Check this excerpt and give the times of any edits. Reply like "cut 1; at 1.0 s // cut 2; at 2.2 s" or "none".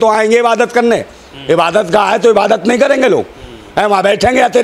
none